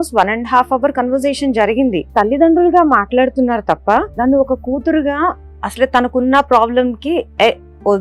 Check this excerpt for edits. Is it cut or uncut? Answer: cut